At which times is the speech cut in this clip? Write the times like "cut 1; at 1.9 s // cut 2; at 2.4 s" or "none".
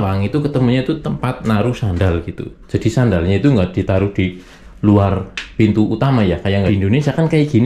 cut 1; at 6.7 s